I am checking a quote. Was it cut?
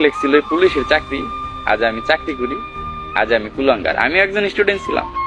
no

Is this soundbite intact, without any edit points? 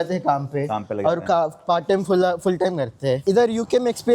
no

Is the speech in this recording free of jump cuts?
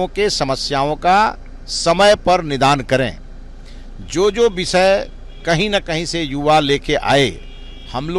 yes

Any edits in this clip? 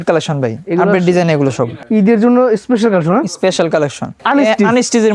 yes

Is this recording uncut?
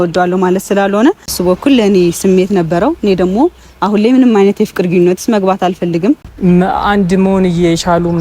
no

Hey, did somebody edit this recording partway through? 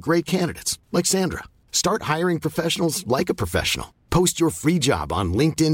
no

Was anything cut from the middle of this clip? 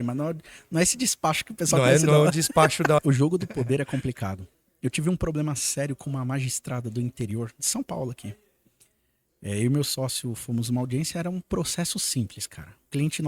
yes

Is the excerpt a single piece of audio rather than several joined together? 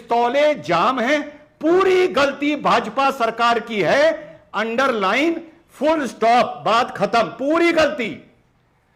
yes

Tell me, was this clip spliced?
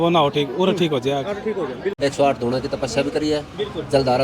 yes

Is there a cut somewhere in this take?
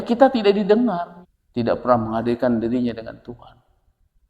yes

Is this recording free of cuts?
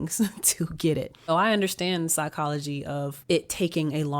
no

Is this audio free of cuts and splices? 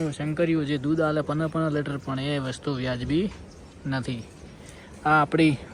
yes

